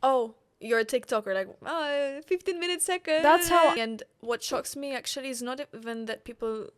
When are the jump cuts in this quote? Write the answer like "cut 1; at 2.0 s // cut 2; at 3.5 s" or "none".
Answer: cut 1; at 3.7 s

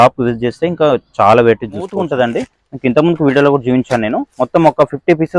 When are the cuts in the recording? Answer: cut 1; at 2.0 s

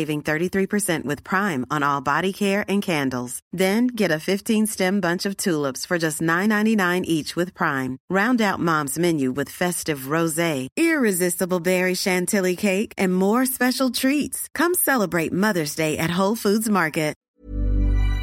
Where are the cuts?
cut 1; at 17.2 s

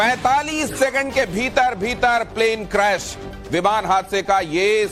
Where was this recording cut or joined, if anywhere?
cut 1; at 1.3 s

